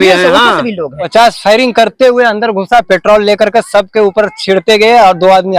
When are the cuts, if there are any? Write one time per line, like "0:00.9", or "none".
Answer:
0:01.0